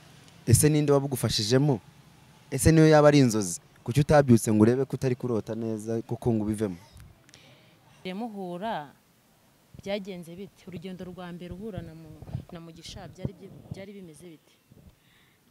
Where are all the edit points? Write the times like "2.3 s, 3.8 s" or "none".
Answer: 8.0 s